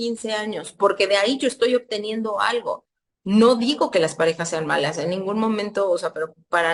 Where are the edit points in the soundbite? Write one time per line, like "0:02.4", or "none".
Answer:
0:02.9